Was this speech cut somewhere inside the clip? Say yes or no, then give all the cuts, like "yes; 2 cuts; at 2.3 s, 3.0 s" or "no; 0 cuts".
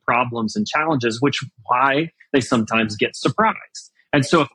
no; 0 cuts